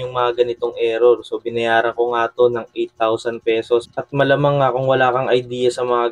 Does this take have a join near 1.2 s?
no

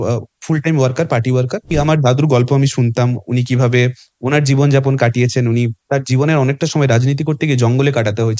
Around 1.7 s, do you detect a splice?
yes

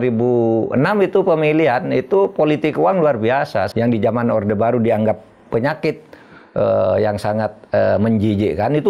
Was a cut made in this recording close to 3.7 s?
yes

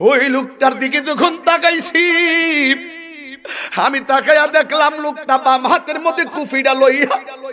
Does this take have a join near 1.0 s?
no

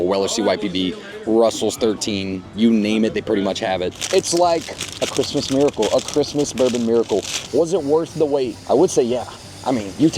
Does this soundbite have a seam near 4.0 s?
yes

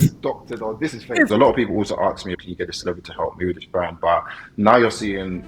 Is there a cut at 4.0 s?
no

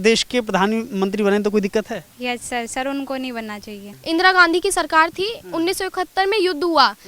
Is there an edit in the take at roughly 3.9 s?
yes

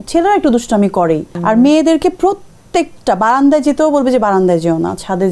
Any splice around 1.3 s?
yes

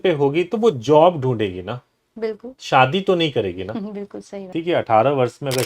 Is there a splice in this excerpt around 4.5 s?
yes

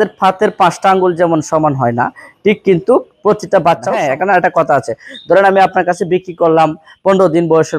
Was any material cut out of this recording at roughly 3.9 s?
yes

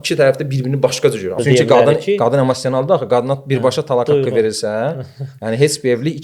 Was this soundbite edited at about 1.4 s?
yes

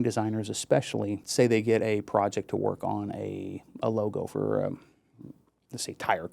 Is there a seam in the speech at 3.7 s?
no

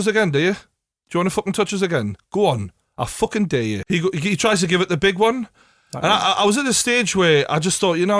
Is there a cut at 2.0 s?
no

